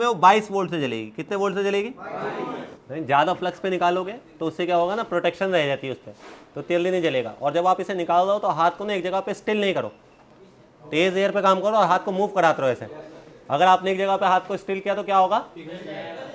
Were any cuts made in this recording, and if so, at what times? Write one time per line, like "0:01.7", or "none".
0:02.8